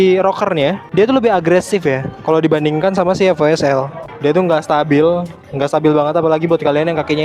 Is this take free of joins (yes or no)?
no